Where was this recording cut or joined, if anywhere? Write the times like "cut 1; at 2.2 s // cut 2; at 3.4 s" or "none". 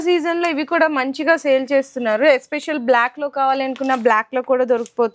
none